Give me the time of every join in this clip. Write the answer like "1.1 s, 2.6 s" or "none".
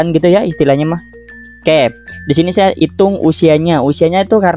2.8 s